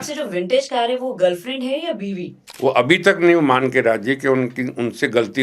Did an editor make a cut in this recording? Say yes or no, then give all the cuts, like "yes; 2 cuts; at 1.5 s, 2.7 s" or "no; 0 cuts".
yes; 1 cut; at 2.5 s